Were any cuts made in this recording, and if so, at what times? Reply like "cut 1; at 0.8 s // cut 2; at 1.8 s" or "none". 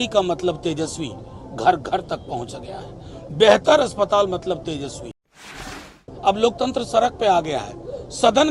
cut 1; at 5.7 s